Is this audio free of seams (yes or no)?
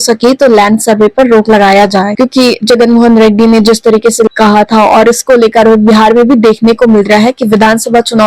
yes